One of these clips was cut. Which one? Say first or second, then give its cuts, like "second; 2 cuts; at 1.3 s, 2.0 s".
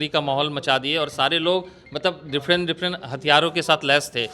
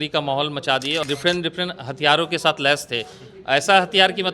second; 1 cut; at 1.0 s